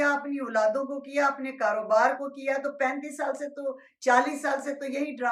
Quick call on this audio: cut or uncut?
uncut